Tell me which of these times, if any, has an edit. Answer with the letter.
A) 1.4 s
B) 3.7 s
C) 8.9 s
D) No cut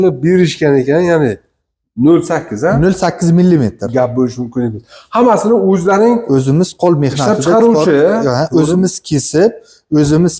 D